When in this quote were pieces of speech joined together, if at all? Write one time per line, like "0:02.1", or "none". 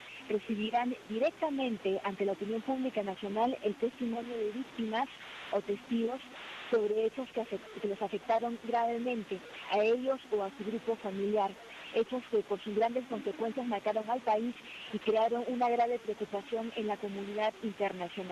none